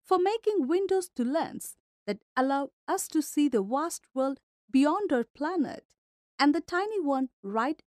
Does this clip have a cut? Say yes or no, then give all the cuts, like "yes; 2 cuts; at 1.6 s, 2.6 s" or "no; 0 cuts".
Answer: no; 0 cuts